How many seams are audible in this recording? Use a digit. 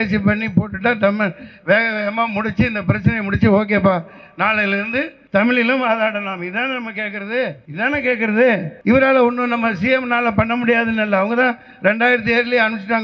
3